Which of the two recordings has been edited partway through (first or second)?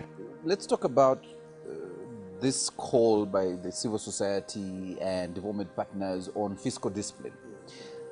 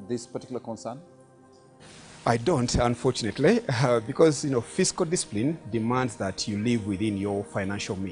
second